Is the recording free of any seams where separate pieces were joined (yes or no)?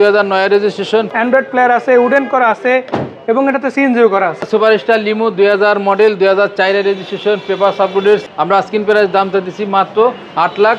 no